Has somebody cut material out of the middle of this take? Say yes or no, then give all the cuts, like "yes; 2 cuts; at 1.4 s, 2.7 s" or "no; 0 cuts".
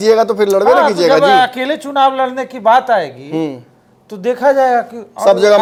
no; 0 cuts